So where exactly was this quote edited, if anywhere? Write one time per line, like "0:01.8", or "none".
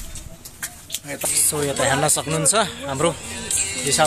0:01.2